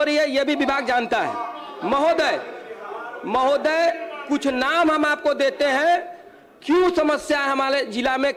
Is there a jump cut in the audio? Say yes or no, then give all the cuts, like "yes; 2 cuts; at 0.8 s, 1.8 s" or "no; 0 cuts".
no; 0 cuts